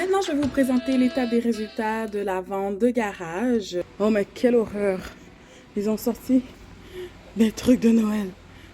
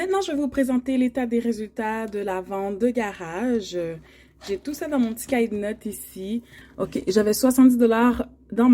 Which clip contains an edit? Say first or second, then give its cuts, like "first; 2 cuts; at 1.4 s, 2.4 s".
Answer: first; 1 cut; at 3.9 s